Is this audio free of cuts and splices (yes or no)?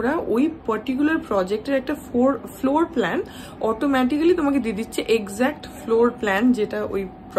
yes